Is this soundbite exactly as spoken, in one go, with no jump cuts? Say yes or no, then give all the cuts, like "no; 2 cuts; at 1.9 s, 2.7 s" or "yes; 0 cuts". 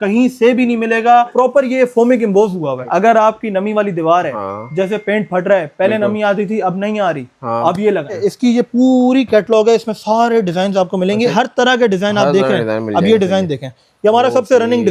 no; 4 cuts; at 1.3 s, 2.8 s, 8.2 s, 11.3 s